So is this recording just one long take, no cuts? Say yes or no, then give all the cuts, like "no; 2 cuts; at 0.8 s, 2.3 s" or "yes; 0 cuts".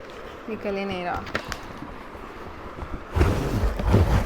no; 1 cut; at 1.3 s